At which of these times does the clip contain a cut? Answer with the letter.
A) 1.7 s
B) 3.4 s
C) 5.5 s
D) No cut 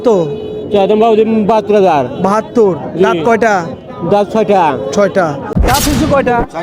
C